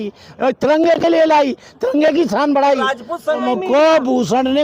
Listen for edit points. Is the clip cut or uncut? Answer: cut